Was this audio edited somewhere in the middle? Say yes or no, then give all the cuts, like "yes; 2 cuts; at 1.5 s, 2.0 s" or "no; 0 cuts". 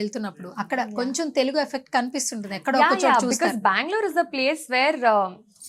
no; 0 cuts